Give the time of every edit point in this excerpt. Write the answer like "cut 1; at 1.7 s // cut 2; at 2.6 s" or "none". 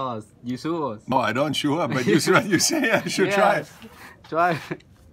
cut 1; at 1.1 s